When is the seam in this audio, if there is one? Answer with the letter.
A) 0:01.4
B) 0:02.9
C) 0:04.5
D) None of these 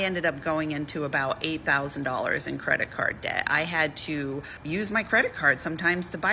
C